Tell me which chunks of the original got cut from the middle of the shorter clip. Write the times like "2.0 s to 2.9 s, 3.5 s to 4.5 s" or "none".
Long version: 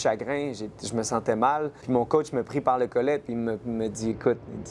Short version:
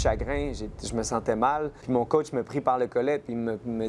none